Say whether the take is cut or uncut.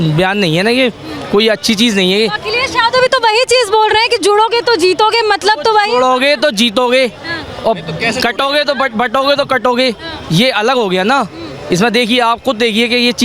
uncut